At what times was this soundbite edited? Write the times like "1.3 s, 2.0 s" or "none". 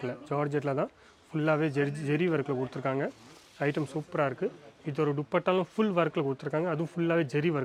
none